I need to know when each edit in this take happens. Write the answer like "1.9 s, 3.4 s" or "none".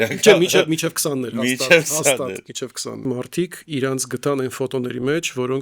3.0 s